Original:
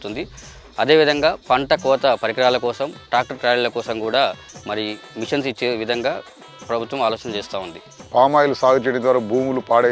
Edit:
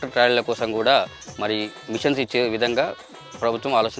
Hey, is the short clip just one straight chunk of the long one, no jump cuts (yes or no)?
yes